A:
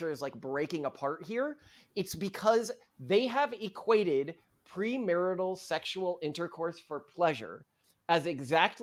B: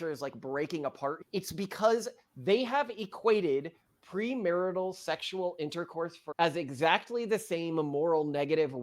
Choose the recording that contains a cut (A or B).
B